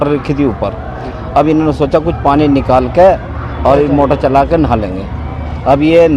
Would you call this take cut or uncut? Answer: uncut